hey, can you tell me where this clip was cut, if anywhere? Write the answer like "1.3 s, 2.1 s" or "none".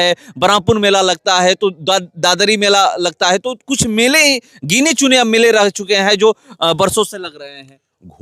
none